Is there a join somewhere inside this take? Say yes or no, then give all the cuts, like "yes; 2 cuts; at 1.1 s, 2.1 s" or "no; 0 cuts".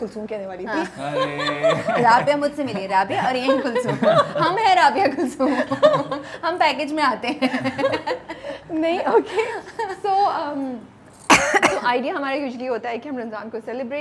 no; 0 cuts